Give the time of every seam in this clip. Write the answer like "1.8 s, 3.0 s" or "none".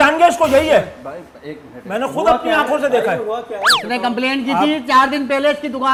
none